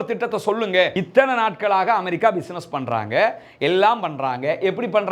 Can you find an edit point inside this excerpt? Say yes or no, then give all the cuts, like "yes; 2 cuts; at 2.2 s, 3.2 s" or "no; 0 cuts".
yes; 1 cut; at 1.0 s